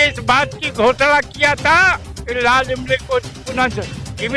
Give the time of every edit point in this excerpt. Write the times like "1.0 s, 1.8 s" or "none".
2.1 s

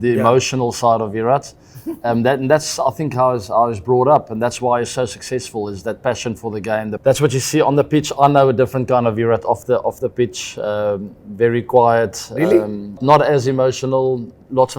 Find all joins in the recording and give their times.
none

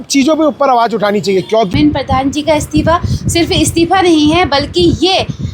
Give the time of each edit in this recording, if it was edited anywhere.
1.7 s

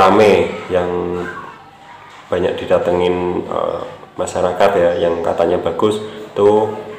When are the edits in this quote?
none

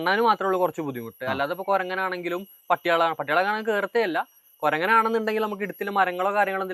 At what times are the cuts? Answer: none

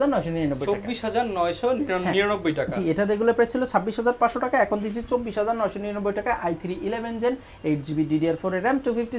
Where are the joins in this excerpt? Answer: none

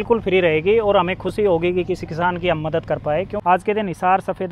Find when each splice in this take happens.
3.3 s

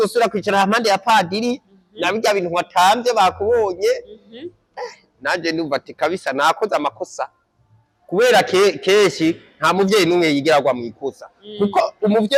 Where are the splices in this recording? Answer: none

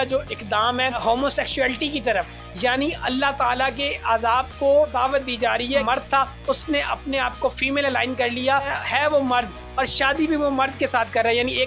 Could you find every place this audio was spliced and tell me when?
1.0 s, 5.4 s, 8.7 s

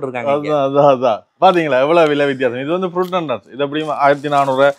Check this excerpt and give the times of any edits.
none

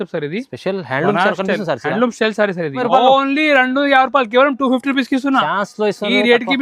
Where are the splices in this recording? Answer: 2.8 s

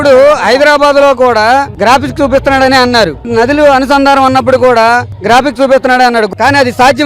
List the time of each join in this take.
3.3 s, 6.3 s

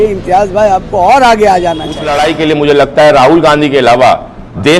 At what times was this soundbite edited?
2.0 s

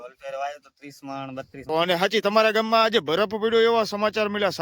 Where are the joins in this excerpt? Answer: 1.5 s

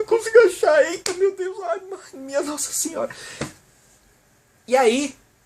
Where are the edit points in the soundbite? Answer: none

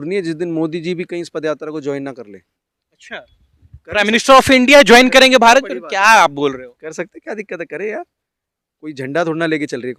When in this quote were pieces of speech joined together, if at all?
none

